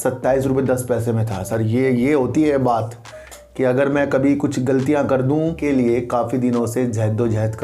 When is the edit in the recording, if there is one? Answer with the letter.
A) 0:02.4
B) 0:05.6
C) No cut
B